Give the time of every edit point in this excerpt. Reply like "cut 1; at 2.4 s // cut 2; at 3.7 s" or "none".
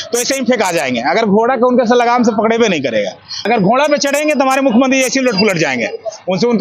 none